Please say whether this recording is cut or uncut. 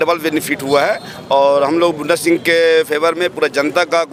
uncut